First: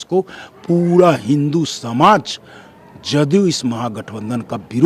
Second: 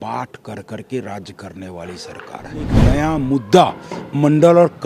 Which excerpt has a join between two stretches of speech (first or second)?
second